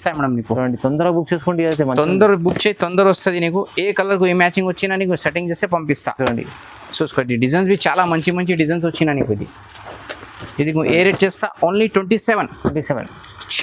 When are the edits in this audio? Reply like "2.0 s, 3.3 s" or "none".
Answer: none